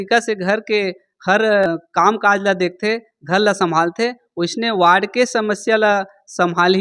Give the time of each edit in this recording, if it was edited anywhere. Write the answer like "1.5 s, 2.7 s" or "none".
1.6 s